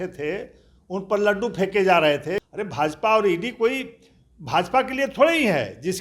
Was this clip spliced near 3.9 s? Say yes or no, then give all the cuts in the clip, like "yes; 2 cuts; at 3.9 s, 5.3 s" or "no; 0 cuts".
no; 1 cut; at 2.4 s